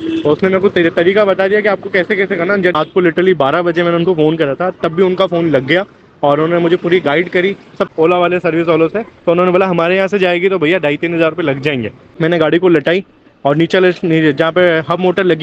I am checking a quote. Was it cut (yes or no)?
yes